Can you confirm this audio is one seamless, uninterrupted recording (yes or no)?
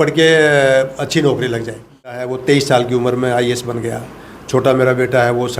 no